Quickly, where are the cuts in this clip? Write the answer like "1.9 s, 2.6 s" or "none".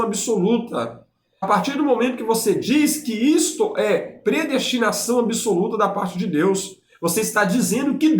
1.5 s